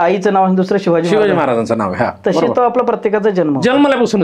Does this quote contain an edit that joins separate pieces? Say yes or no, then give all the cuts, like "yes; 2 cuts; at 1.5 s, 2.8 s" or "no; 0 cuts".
no; 0 cuts